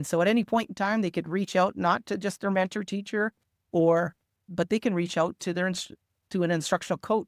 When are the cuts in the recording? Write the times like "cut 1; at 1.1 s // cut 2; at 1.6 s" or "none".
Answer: none